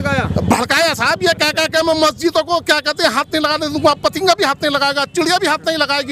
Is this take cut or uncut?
uncut